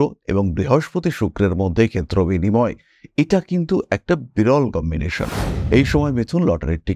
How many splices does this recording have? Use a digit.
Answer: 1